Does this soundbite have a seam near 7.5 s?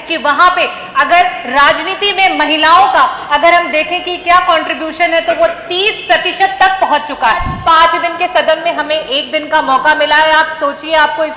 yes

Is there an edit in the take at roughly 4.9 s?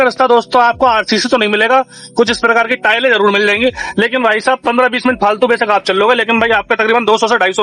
no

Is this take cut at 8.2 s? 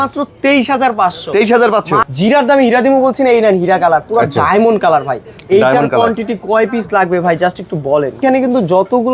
yes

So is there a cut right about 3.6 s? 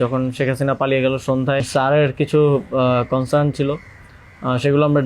no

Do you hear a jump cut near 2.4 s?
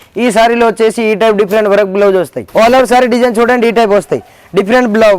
yes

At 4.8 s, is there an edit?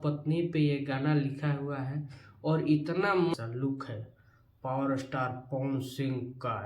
no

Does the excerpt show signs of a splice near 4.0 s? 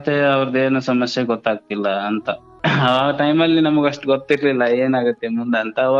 no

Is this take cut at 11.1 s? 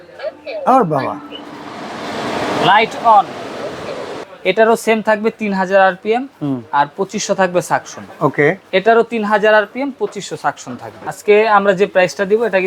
yes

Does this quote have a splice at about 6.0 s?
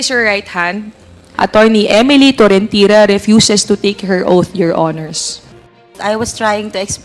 yes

